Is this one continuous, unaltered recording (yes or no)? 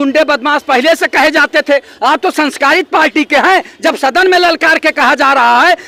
yes